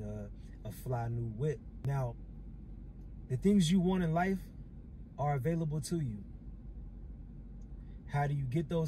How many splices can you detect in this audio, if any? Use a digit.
1